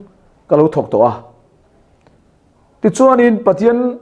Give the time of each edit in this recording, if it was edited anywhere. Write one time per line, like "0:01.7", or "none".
none